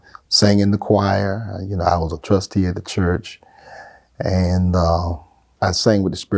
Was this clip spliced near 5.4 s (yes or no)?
yes